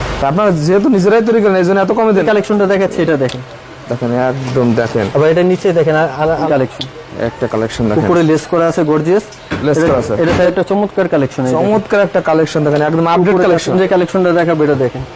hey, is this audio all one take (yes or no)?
no